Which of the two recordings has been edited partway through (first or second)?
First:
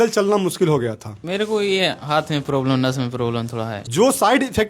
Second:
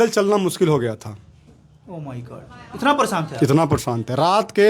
first